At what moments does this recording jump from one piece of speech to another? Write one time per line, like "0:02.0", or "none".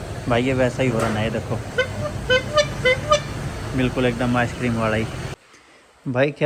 0:05.3